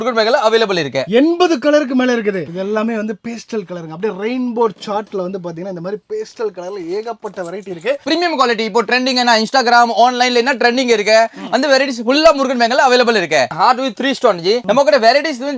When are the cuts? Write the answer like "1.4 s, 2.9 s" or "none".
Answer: 2.4 s, 8.0 s, 13.5 s